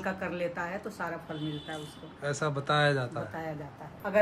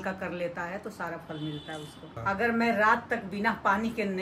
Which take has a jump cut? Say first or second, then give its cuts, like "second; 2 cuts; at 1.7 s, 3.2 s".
second; 1 cut; at 2.1 s